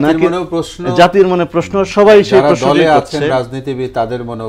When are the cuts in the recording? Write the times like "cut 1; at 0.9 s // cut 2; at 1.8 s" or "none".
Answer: none